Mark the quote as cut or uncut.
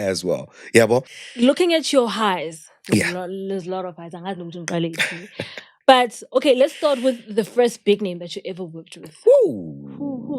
cut